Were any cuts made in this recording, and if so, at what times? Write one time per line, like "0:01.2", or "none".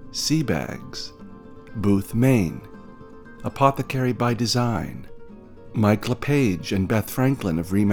none